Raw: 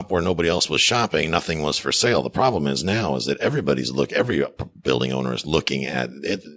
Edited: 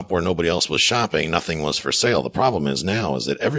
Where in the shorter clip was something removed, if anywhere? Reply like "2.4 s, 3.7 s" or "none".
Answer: none